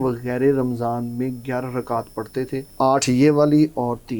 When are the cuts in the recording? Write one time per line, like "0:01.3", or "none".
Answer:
0:02.7